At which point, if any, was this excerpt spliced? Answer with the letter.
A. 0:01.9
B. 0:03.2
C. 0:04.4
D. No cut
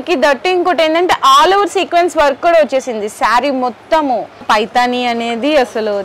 C